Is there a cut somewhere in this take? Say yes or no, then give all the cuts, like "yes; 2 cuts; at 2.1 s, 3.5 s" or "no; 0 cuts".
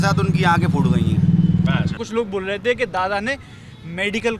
yes; 1 cut; at 2.0 s